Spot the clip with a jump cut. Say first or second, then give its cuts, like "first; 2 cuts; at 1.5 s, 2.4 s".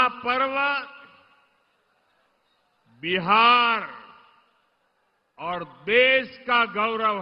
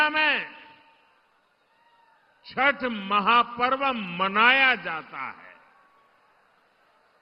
second; 1 cut; at 3.1 s